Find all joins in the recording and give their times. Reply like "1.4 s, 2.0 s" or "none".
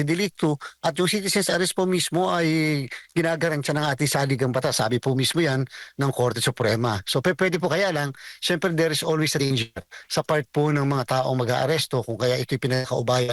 none